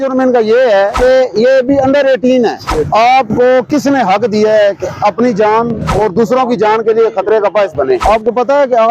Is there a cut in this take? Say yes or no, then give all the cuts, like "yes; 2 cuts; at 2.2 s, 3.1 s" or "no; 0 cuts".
yes; 4 cuts; at 0.9 s, 2.6 s, 5.8 s, 8.0 s